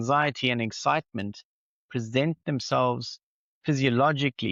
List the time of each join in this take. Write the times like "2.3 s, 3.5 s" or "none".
none